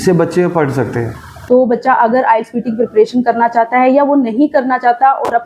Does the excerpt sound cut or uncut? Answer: cut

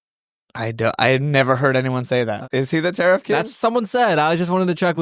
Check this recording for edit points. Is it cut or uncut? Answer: cut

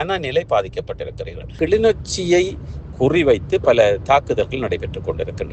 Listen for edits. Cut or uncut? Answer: cut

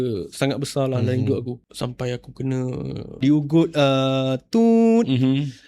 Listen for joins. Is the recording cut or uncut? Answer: cut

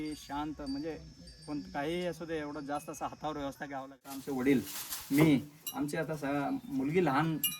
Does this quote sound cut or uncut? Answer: cut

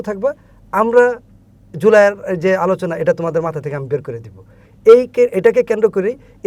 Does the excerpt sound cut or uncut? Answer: uncut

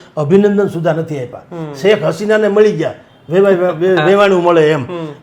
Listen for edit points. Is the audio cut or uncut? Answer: uncut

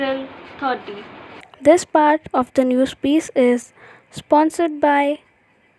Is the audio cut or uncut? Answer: uncut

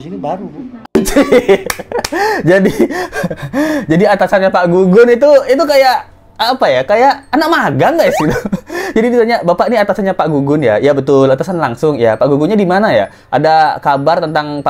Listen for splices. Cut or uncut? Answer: uncut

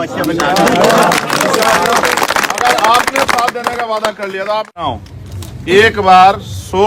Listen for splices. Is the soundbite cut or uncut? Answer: cut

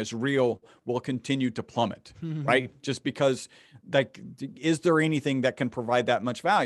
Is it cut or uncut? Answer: uncut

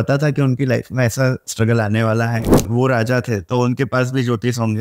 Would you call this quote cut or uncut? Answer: cut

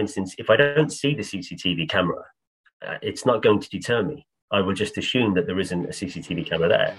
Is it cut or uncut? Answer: uncut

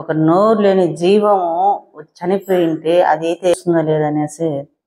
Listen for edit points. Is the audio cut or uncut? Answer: cut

